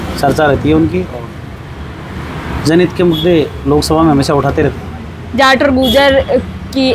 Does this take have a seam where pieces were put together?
no; 0 cuts

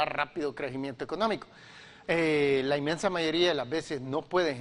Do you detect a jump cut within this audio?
no; 0 cuts

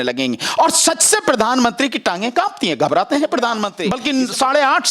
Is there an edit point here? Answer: yes; 1 cut; at 3.8 s

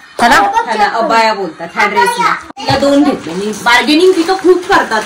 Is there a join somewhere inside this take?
yes; 1 cut; at 2.5 s

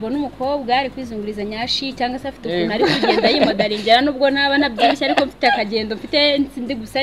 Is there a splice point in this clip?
no; 0 cuts

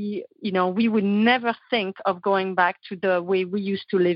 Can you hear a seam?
no; 0 cuts

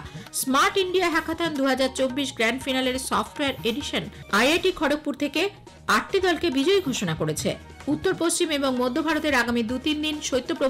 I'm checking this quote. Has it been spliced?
yes; 1 cut; at 4.2 s

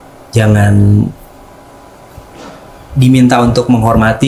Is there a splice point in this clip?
no; 0 cuts

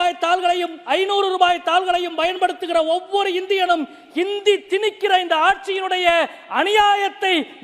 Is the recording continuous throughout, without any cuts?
yes; 0 cuts

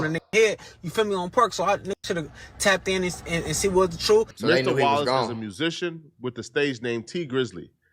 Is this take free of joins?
no; 1 cut; at 4.3 s

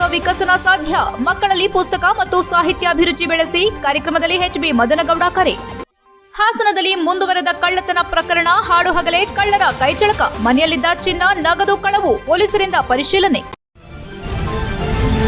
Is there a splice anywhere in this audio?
yes; 1 cut; at 13.5 s

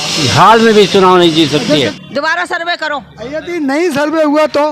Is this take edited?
yes; 1 cut; at 1.9 s

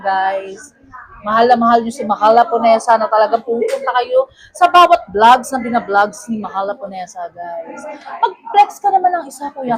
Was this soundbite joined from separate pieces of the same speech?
no; 0 cuts

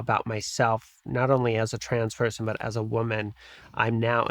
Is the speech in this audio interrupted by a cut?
no; 0 cuts

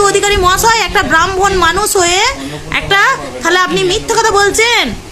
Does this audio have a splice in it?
no; 0 cuts

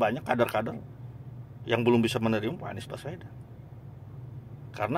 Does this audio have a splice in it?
no; 0 cuts

